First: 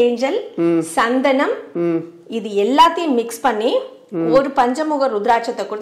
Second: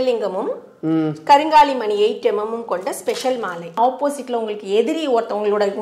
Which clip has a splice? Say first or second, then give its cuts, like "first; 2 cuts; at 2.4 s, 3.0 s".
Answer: second; 1 cut; at 3.8 s